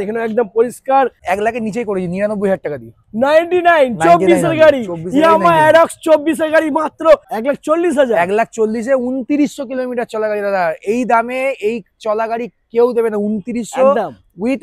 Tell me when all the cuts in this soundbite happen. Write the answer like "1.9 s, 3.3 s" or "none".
1.2 s, 7.3 s